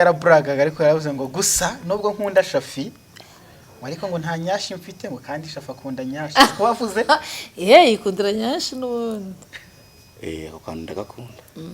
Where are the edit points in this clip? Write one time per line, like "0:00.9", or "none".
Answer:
none